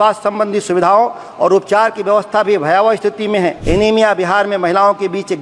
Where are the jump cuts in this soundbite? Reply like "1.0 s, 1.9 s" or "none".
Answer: 3.6 s